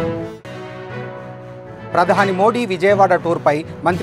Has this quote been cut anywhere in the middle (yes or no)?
yes